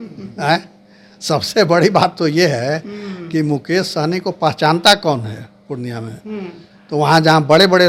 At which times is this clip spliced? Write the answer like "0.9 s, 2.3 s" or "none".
none